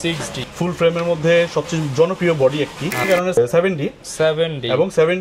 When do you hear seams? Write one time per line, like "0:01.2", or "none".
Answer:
0:03.1